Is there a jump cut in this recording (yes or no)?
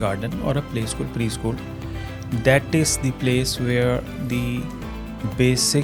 no